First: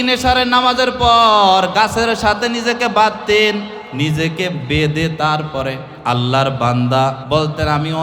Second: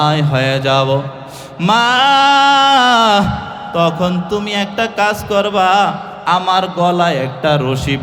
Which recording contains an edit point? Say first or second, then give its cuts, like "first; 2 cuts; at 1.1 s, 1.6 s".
first; 3 cuts; at 3.8 s, 5.9 s, 7.2 s